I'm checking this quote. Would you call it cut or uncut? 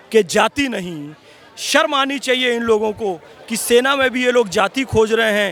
uncut